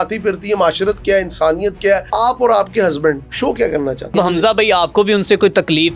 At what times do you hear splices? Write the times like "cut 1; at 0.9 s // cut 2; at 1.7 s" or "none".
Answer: cut 1; at 2.1 s // cut 2; at 3.3 s // cut 3; at 4.1 s